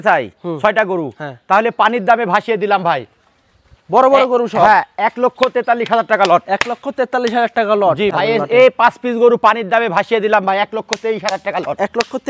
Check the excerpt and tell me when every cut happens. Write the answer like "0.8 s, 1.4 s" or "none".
8.1 s